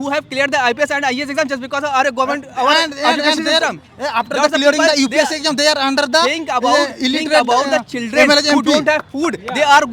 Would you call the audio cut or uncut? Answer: uncut